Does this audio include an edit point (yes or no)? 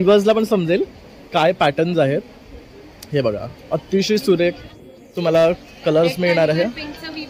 no